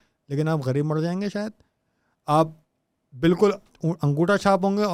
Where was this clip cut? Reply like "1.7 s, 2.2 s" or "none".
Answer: none

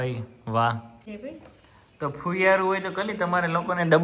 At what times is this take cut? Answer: 1.1 s

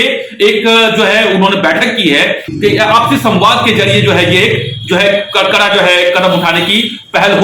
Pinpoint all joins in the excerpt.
2.4 s

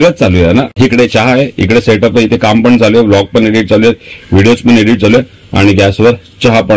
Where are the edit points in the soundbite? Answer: none

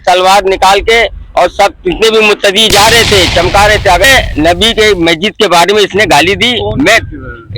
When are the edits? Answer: 4.0 s

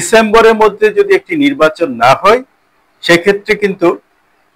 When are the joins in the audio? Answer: none

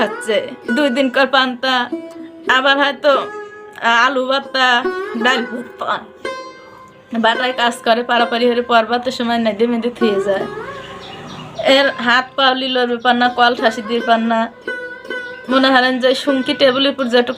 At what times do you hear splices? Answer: none

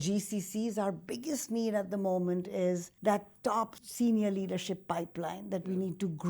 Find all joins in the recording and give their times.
2.9 s, 3.8 s

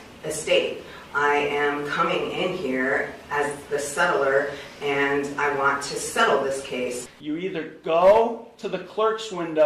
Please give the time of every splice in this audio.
7.1 s

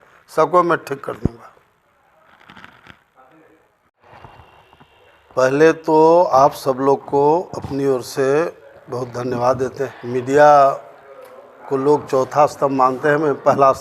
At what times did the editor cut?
4.0 s, 9.9 s

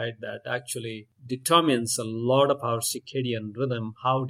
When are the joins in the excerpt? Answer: 1.1 s

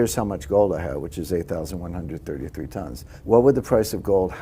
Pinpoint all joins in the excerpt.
3.1 s

